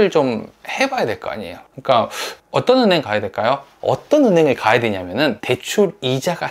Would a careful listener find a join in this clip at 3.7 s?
yes; 2 cuts; at 3.7 s, 5.6 s

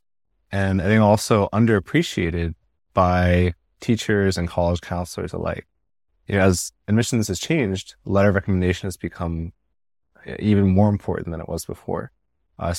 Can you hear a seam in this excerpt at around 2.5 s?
no; 0 cuts

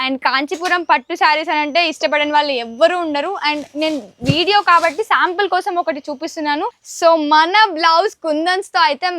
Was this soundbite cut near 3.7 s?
no; 1 cut; at 6.8 s

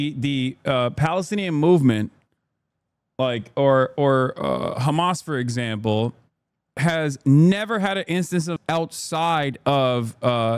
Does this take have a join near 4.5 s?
no; 0 cuts

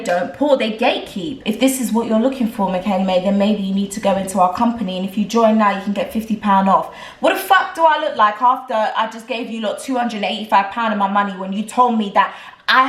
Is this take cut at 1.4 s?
yes; 1 cut; at 1.4 s

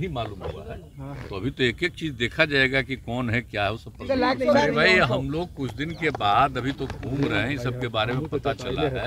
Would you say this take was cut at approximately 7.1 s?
no; 1 cut; at 4.5 s

